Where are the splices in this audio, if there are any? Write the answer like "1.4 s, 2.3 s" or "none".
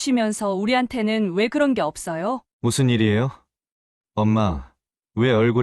2.5 s

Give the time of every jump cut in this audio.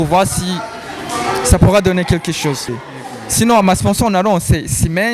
2.7 s

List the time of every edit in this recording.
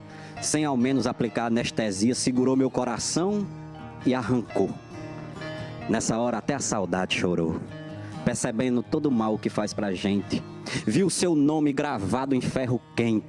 4.7 s

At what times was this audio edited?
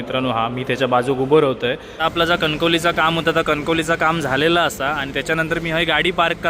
1.9 s

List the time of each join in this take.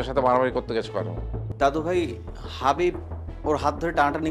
1.4 s

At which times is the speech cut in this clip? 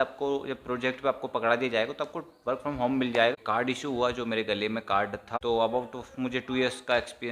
3.3 s, 5.3 s

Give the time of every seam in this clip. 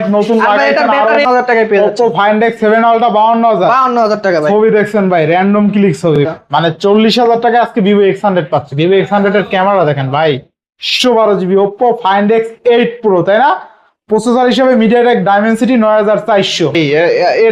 1.1 s, 6.2 s, 10.9 s, 16.7 s

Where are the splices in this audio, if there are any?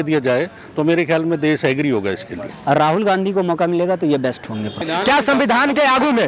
2.4 s, 4.8 s

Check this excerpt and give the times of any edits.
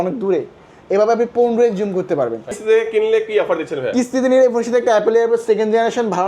2.6 s

